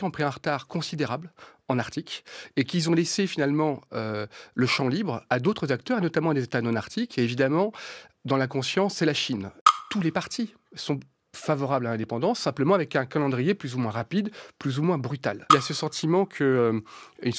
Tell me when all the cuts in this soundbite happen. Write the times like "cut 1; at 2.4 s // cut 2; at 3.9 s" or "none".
cut 1; at 9.7 s // cut 2; at 15.5 s

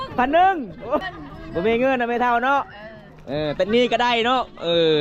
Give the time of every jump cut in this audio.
cut 1; at 1.0 s

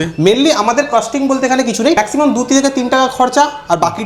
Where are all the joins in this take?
cut 1; at 2.0 s

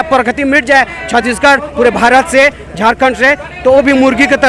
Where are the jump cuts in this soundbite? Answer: none

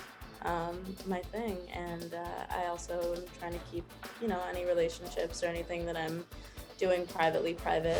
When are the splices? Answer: none

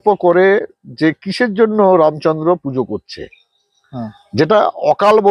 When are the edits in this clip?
none

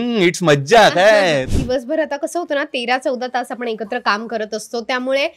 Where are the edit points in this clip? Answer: cut 1; at 1.5 s

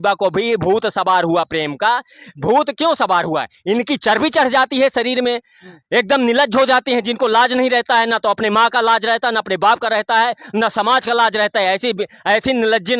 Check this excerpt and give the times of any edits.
none

